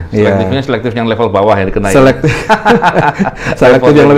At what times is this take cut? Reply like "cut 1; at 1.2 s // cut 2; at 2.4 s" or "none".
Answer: none